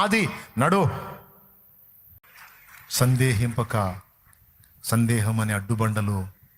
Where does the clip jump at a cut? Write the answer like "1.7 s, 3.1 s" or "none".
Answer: 2.2 s